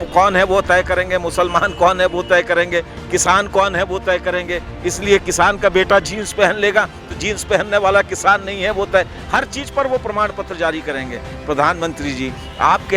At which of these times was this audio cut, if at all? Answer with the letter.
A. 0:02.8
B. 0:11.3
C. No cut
B